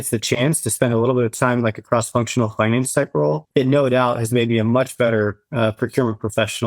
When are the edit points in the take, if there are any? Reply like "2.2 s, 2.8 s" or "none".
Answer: 3.4 s